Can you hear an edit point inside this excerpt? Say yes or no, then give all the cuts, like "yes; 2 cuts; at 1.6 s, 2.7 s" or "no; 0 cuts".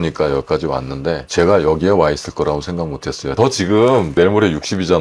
yes; 2 cuts; at 1.2 s, 3.3 s